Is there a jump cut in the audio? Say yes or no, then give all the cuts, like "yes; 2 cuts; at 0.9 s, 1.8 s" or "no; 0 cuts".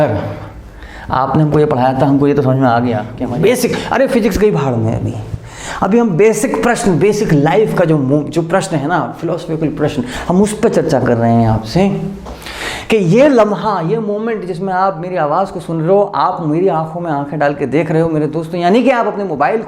yes; 1 cut; at 3.2 s